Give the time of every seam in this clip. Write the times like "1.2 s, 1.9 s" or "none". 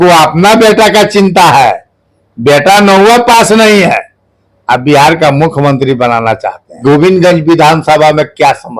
6.8 s

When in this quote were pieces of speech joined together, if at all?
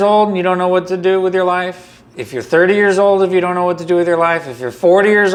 none

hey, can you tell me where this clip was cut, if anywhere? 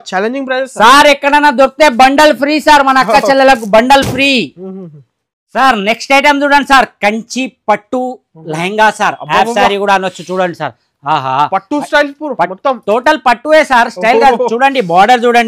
none

